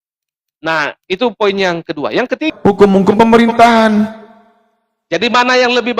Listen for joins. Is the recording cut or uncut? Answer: cut